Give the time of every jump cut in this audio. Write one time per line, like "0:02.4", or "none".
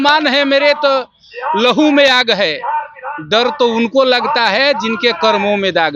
none

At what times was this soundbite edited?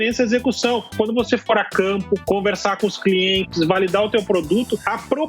0:00.9

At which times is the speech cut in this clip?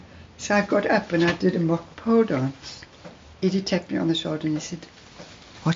0:03.1

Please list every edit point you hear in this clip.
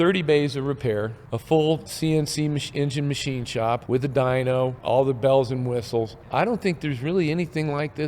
0:01.2
0:01.9
0:03.8
0:04.8
0:06.2

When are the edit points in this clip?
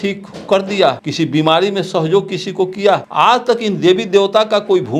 0:01.0
0:03.1

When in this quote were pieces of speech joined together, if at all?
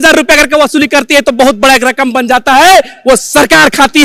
none

